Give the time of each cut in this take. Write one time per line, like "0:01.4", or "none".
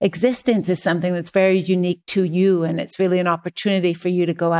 none